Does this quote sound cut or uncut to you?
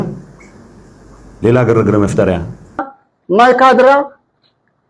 cut